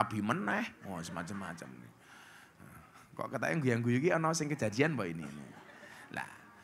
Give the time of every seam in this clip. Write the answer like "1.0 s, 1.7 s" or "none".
none